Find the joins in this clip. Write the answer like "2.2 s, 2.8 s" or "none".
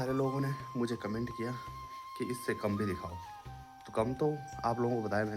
none